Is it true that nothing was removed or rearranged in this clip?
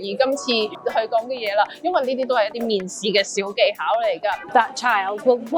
no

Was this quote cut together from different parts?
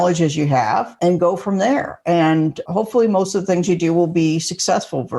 yes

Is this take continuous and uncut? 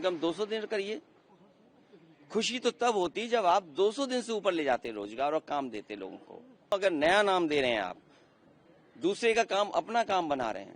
no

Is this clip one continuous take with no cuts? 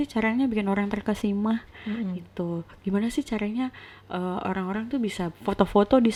yes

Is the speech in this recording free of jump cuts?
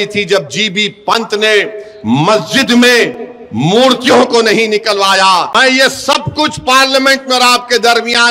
no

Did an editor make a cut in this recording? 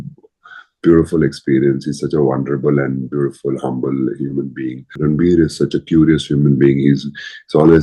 yes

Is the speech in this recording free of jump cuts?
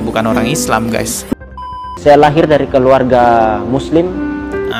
no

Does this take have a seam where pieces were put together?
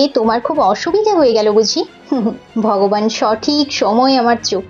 no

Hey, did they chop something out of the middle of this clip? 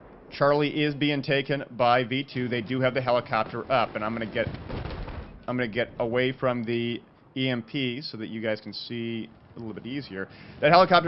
no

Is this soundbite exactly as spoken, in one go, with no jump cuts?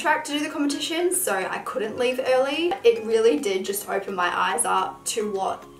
no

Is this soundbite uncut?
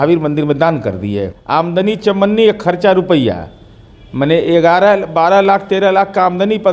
no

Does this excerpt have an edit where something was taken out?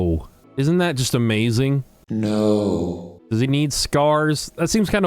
yes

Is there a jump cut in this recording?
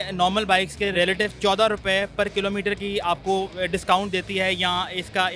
yes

